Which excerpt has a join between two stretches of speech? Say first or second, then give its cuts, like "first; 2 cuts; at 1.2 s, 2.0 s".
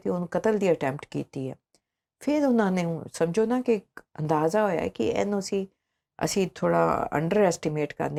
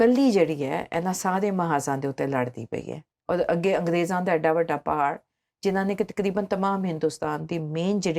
second; 1 cut; at 3.1 s